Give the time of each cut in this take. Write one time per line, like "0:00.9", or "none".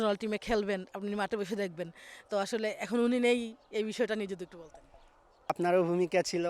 0:05.5